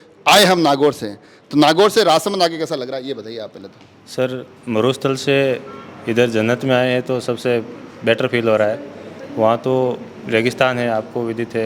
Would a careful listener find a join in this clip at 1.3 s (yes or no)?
no